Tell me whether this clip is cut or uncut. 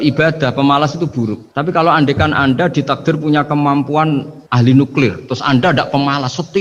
cut